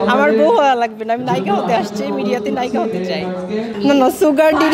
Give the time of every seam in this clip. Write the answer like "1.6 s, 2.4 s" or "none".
3.7 s